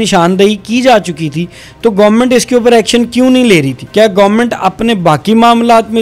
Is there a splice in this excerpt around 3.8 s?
yes; 1 cut; at 3.8 s

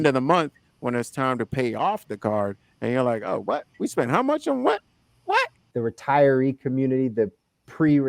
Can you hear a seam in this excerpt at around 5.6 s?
yes; 1 cut; at 5.6 s

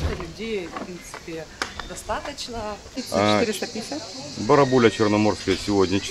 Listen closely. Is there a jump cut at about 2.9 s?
yes; 1 cut; at 2.9 s

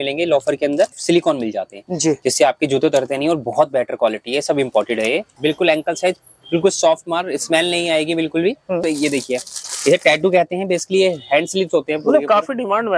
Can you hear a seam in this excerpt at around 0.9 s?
yes; 3 cuts; at 0.9 s, 5.3 s, 8.8 s

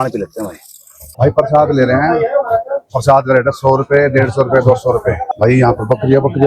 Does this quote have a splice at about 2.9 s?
no; 2 cuts; at 1.1 s, 5.3 s

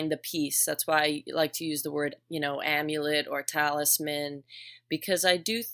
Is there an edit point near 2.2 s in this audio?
no; 0 cuts

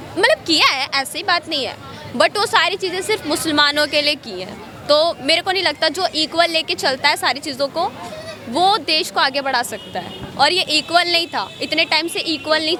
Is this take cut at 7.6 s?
no; 0 cuts

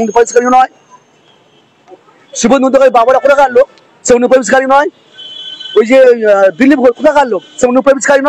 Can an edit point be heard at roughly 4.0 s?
no; 0 cuts

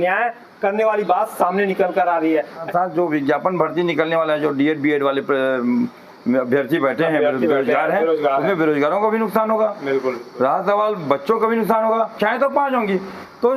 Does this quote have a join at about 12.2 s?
yes; 2 cuts; at 2.7 s, 12.2 s

